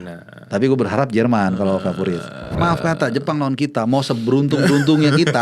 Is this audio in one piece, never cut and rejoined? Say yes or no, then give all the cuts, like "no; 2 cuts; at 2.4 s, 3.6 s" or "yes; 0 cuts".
no; 1 cut; at 2.5 s